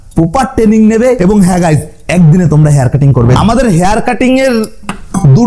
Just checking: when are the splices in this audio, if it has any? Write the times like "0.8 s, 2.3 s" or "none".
3.3 s